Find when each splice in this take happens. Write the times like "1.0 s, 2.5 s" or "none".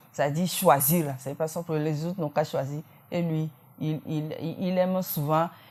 none